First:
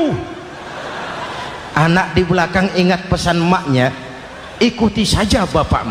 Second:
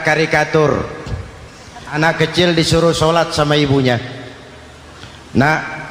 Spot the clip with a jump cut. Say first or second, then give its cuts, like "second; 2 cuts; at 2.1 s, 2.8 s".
second; 1 cut; at 2.0 s